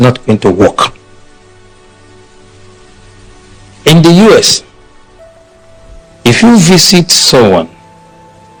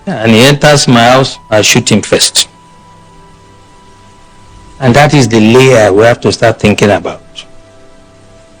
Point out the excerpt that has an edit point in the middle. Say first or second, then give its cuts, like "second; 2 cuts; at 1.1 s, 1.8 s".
second; 2 cuts; at 2.7 s, 4.8 s